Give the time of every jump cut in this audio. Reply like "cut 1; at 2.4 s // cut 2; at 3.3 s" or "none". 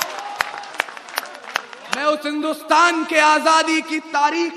cut 1; at 2.0 s